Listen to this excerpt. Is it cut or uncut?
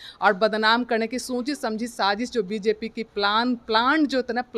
uncut